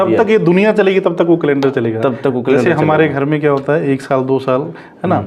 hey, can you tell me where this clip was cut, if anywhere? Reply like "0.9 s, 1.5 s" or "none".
none